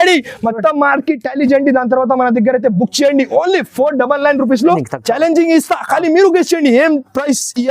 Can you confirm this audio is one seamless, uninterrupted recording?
no; 1 cut; at 4.8 s

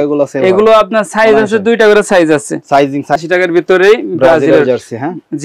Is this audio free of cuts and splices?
no; 1 cut; at 3.2 s

